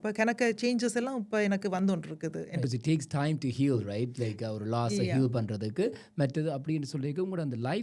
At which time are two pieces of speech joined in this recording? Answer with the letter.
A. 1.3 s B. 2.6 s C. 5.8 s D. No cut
B